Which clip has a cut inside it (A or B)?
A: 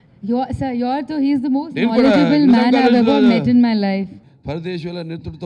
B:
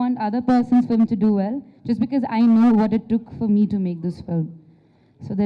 A